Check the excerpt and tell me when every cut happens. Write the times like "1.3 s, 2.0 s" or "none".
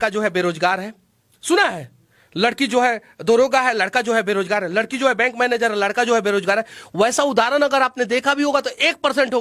none